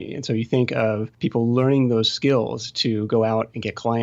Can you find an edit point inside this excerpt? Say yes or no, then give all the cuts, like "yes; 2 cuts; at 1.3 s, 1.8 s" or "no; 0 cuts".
yes; 1 cut; at 1.1 s